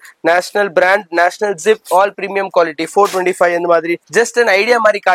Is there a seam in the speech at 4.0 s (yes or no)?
yes